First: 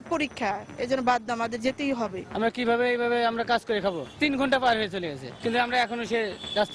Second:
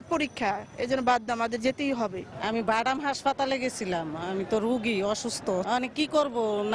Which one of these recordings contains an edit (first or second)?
first